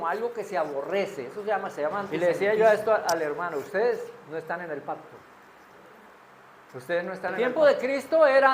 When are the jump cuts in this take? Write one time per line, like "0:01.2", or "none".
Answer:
0:02.1
0:07.3